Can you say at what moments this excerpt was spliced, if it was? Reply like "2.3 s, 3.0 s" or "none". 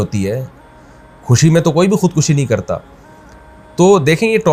none